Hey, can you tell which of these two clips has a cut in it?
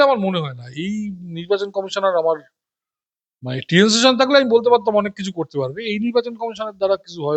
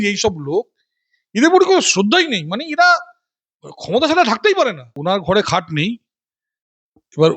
second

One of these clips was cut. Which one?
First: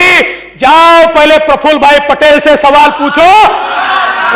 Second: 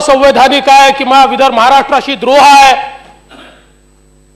first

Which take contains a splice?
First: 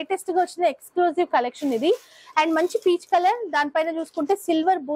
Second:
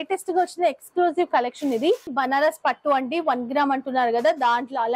second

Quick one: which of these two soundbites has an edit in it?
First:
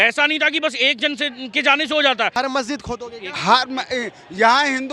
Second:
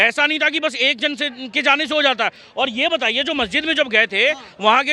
first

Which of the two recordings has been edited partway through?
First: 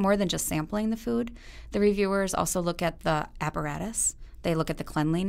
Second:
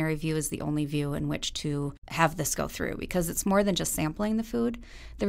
second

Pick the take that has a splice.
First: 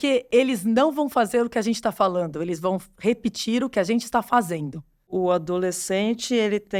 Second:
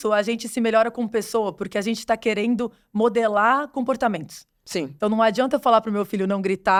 first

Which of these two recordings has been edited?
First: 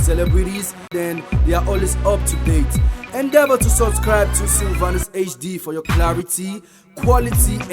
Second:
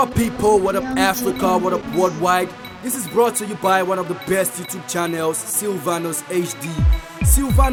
first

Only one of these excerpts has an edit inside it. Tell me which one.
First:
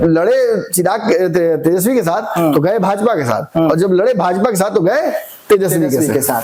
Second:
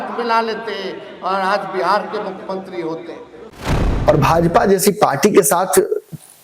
second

